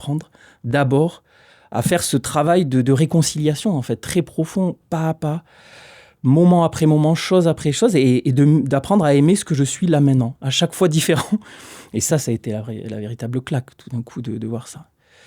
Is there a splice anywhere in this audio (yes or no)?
no